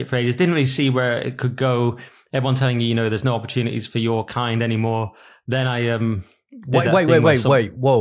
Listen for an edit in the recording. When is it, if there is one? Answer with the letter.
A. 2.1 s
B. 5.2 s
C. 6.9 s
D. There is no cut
D